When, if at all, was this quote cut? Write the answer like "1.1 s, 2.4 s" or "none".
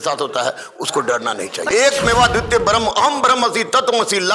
1.7 s